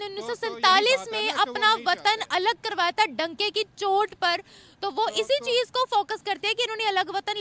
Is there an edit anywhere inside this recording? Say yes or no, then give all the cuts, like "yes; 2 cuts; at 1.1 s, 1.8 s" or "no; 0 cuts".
no; 0 cuts